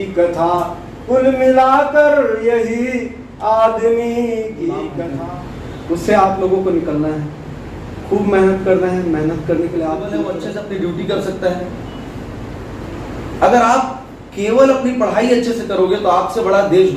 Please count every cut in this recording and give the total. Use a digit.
2